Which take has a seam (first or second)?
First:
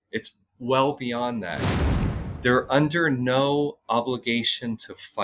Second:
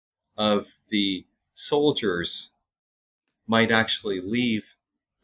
first